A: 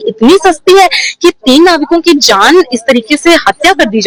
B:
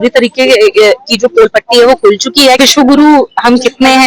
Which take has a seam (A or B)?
B